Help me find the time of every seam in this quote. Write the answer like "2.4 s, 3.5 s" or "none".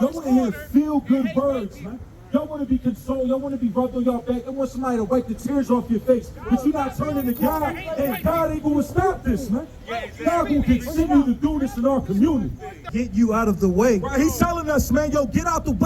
12.8 s